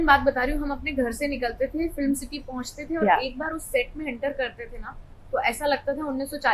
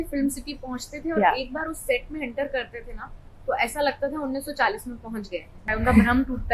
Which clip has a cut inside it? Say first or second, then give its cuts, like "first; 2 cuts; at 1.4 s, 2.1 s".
second; 1 cut; at 5.6 s